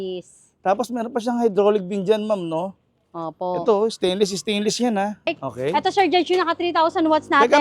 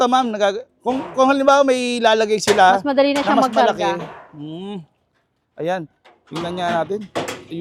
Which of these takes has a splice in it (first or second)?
first